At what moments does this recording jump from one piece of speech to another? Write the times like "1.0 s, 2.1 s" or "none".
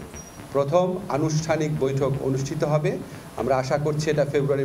none